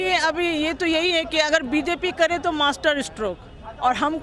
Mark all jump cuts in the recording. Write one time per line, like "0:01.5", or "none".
none